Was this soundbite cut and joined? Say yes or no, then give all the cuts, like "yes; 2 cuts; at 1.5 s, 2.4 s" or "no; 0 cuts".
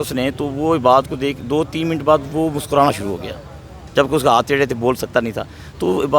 no; 0 cuts